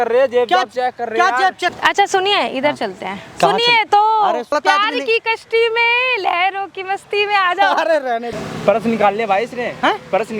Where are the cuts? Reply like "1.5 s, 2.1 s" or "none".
1.8 s, 4.5 s, 8.3 s